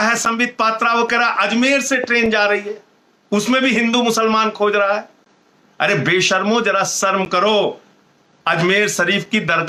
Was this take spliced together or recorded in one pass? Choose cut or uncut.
uncut